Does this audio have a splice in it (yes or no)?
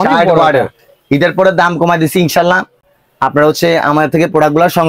no